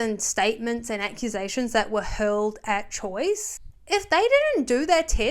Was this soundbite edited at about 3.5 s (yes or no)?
yes